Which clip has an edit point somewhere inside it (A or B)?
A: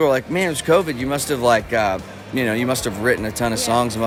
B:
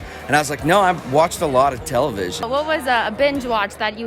B